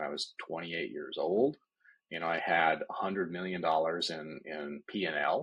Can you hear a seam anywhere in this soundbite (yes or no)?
no